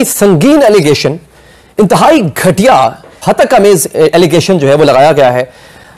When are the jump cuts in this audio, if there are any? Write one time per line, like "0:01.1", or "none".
none